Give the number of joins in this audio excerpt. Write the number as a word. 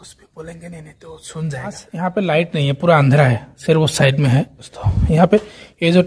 one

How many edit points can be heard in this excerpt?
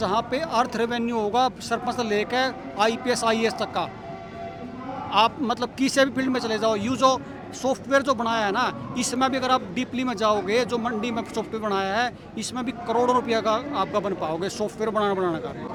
zero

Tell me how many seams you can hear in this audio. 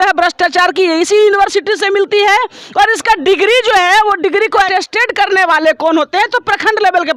one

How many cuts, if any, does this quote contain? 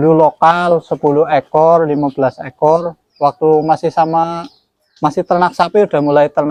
zero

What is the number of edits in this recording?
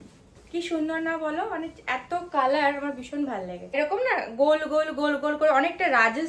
one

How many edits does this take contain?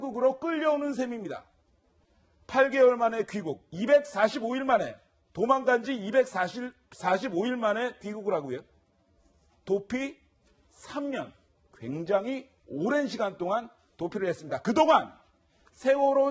zero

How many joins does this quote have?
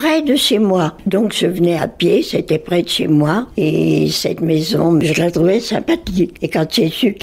one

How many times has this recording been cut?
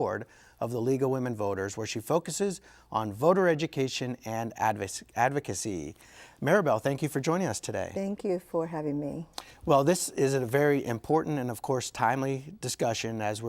one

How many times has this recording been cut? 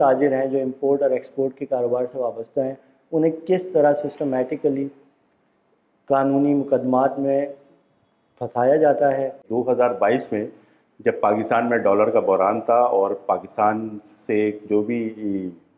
one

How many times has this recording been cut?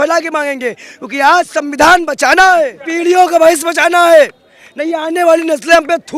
one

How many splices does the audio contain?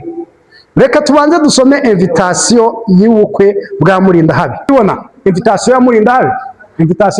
one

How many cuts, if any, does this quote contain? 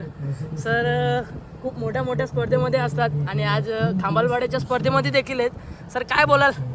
zero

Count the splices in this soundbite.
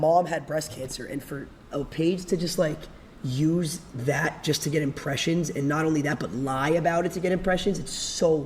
zero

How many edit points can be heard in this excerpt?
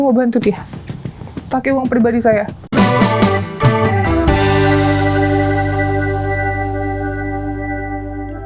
one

